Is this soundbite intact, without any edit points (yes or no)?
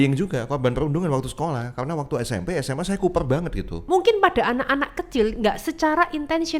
no